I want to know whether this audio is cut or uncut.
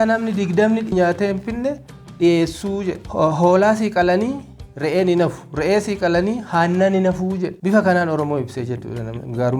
cut